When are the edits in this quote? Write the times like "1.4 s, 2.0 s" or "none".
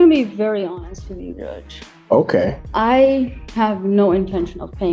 2.6 s